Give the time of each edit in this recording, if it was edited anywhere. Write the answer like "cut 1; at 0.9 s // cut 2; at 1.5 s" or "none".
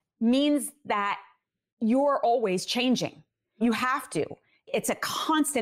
cut 1; at 3.6 s // cut 2; at 4.7 s